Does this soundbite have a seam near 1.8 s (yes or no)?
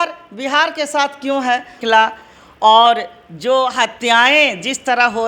yes